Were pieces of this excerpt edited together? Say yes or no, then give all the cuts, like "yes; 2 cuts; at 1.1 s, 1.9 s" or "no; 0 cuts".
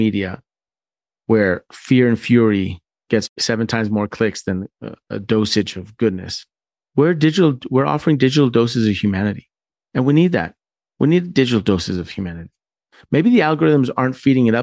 yes; 1 cut; at 3.4 s